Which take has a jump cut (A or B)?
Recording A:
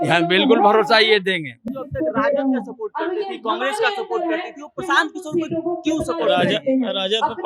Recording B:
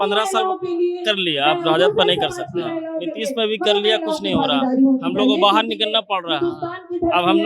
A